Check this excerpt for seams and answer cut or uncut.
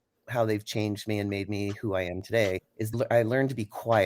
cut